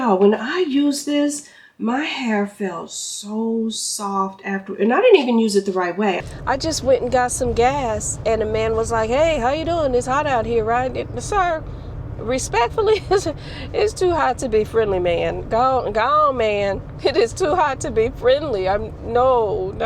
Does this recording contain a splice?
yes; 1 cut; at 6.2 s

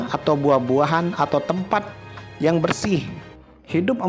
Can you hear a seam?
yes; 1 cut; at 3.2 s

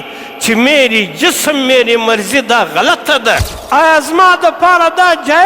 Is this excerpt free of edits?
no; 1 cut; at 3.5 s

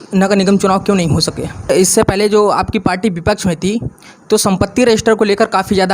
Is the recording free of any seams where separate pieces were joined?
no; 1 cut; at 1.7 s

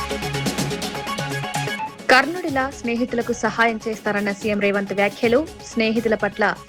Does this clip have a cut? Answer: yes; 1 cut; at 1.3 s

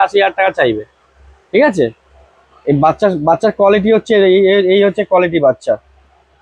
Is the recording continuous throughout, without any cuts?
yes; 0 cuts

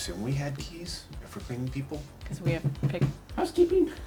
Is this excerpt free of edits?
yes; 0 cuts

